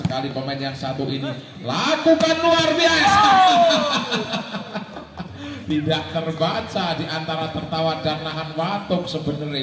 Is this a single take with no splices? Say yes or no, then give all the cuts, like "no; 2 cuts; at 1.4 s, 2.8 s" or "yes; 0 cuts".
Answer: yes; 0 cuts